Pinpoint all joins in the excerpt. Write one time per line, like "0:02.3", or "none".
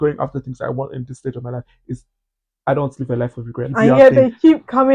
0:03.7